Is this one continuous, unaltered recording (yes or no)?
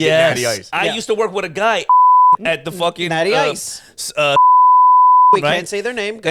yes